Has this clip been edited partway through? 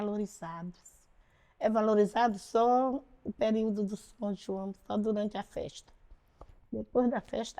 no; 0 cuts

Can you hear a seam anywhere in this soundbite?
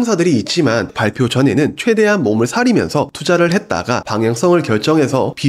yes; 2 cuts; at 0.9 s, 4.1 s

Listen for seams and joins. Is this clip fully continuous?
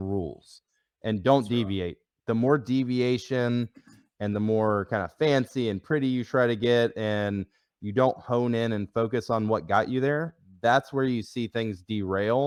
yes; 0 cuts

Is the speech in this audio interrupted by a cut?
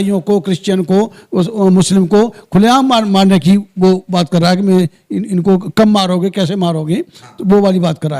no; 0 cuts

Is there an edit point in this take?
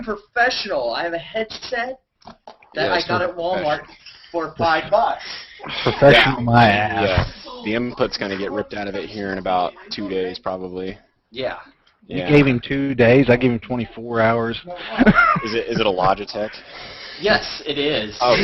yes; 1 cut; at 4.9 s

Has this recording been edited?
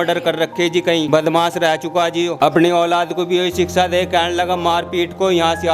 yes; 2 cuts; at 1.1 s, 2.3 s

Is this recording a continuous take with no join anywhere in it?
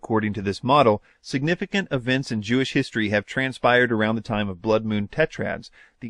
yes; 0 cuts

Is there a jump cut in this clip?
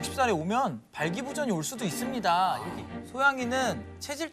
yes; 1 cut; at 2.7 s

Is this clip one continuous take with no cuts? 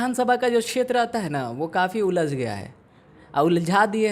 yes; 0 cuts

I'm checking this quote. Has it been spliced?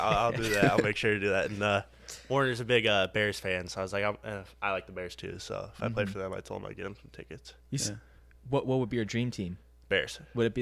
no; 0 cuts

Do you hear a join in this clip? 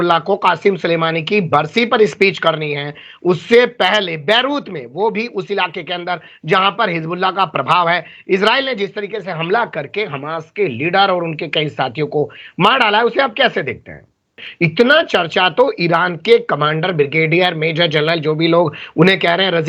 yes; 1 cut; at 14.4 s

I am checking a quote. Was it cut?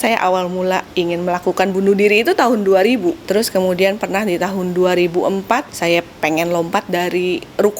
yes; 3 cuts; at 0.9 s, 3.2 s, 5.7 s

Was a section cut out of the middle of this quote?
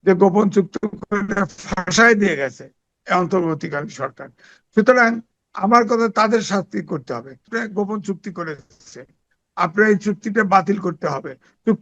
yes; 1 cut; at 7.5 s

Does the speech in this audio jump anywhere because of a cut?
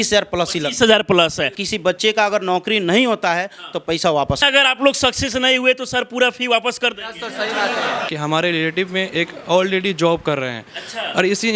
yes; 3 cuts; at 1.6 s, 4.4 s, 8.1 s

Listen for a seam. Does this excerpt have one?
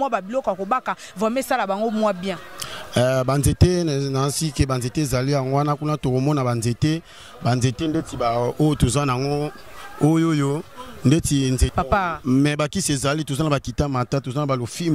yes; 1 cut; at 11.7 s

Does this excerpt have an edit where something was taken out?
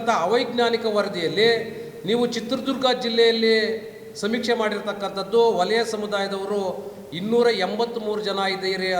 no; 0 cuts

